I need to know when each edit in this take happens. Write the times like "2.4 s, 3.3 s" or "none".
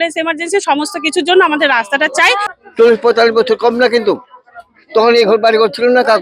2.5 s